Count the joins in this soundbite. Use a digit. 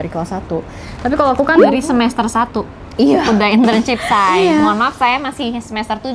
0